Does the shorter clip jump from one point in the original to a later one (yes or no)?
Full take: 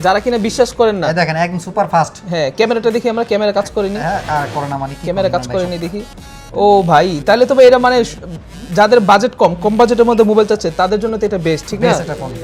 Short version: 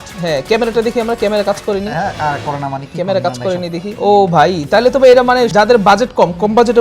yes